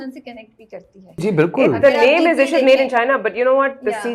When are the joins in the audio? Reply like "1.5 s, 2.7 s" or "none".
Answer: 1.2 s

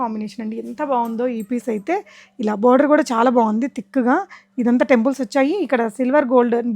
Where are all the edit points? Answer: none

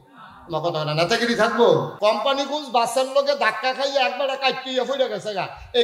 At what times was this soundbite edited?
1.9 s

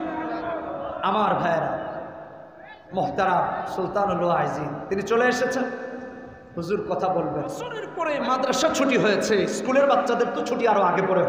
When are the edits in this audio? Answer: 7.9 s

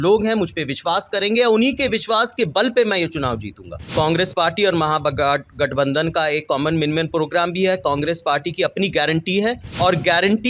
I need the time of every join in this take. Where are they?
3.8 s, 9.7 s

